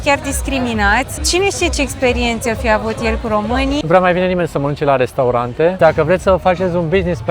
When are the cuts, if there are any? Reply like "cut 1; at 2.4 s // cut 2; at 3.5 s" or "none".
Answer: cut 1; at 1.2 s // cut 2; at 3.8 s // cut 3; at 5.8 s